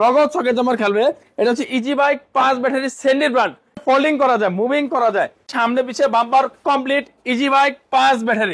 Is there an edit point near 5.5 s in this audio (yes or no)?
yes